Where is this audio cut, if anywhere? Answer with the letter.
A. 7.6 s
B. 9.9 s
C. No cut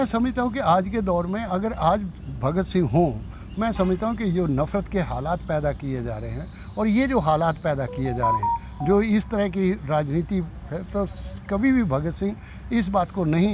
C